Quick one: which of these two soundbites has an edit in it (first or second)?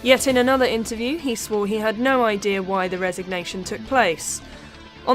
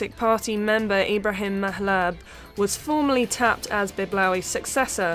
first